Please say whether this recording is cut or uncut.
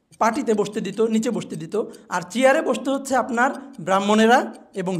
uncut